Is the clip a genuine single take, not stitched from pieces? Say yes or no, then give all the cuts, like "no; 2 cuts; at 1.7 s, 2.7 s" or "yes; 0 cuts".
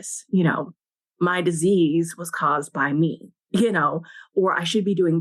yes; 0 cuts